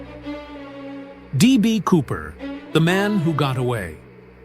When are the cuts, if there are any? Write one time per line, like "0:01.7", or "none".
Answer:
0:01.3